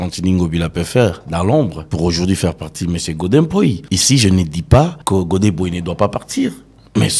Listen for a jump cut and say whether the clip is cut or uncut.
cut